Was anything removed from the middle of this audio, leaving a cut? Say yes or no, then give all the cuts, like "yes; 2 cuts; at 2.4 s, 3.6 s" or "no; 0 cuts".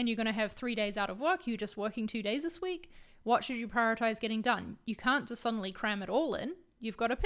no; 0 cuts